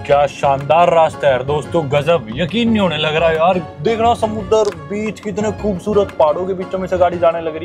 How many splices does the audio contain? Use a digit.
1